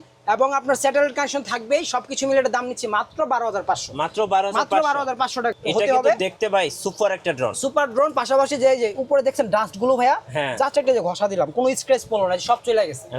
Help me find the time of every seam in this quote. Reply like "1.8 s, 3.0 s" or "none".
5.6 s